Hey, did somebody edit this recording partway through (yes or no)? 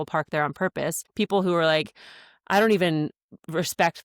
yes